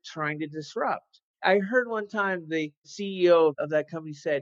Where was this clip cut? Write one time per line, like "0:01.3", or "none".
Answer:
0:01.2
0:02.9